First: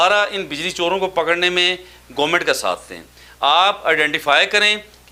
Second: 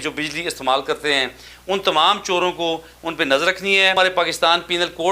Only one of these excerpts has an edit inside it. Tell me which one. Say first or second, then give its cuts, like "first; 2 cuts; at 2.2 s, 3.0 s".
second; 1 cut; at 4.0 s